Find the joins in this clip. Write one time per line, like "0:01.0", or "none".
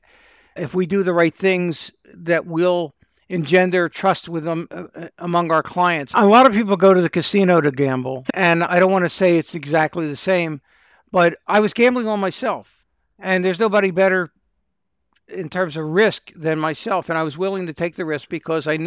0:06.1
0:08.2
0:12.8